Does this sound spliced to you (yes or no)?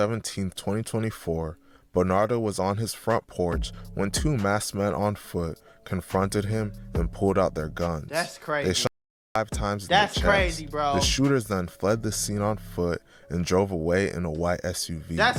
no